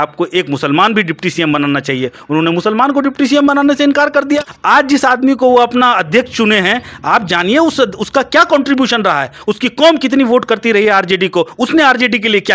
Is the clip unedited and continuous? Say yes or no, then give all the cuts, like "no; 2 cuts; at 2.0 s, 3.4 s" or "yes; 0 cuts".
no; 1 cut; at 4.5 s